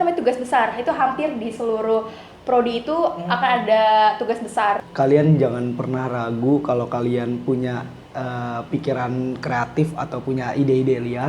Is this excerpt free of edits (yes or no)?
no